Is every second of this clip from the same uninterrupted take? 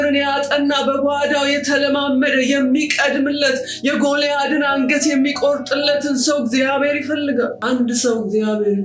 no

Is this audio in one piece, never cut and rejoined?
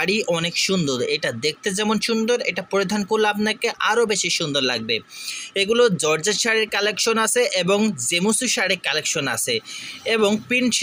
yes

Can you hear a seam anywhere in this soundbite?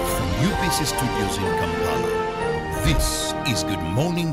no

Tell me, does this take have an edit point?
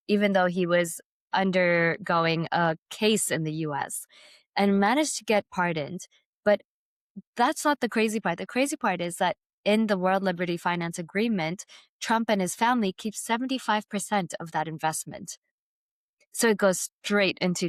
no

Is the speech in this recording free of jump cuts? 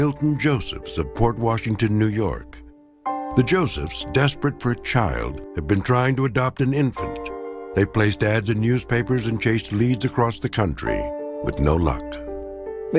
no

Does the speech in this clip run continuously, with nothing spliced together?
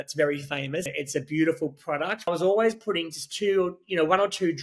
no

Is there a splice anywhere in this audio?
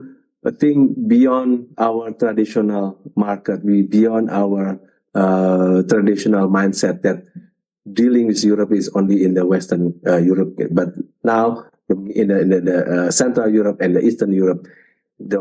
no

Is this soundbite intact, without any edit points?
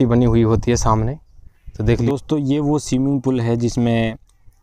no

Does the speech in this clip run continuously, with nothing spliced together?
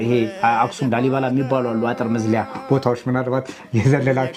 yes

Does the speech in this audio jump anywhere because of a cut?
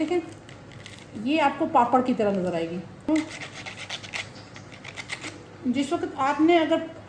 yes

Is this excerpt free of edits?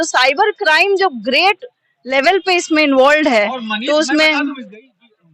yes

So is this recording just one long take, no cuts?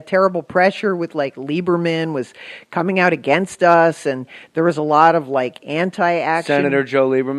yes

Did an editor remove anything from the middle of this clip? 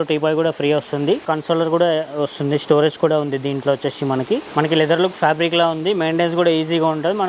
yes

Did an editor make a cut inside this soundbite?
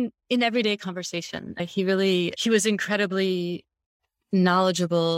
no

